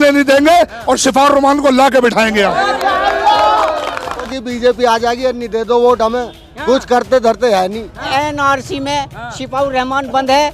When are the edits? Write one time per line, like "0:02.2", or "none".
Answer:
0:04.3
0:08.1